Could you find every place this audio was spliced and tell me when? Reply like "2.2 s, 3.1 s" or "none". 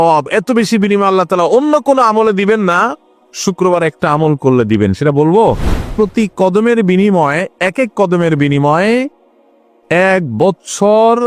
5.9 s